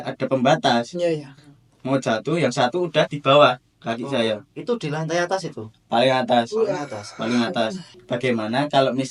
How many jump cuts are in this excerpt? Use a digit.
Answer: 1